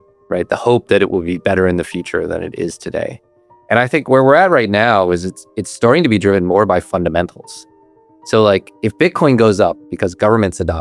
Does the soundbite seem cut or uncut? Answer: uncut